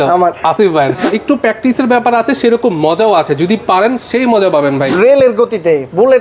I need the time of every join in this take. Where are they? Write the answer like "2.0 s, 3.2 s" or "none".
1.1 s, 4.9 s